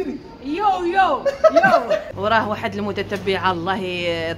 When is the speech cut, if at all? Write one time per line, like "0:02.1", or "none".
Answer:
0:02.1